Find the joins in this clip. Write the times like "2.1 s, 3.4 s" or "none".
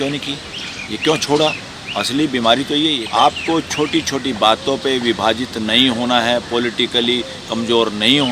3.0 s

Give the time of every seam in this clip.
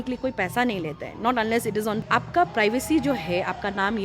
2.0 s

